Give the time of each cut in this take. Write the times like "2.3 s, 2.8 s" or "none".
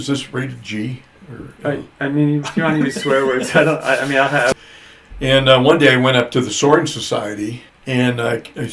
4.5 s, 7.7 s